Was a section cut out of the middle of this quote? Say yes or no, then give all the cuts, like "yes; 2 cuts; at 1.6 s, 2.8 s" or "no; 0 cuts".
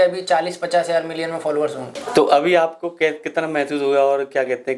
no; 0 cuts